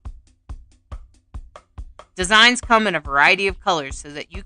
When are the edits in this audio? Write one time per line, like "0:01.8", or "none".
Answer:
0:01.8